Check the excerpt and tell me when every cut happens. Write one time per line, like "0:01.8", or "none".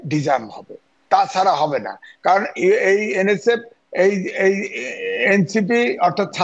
none